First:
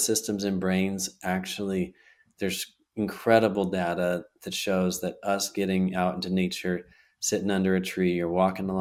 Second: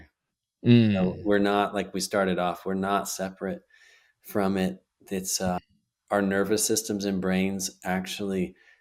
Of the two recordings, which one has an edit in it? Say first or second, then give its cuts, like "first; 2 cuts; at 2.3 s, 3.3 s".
second; 1 cut; at 5.6 s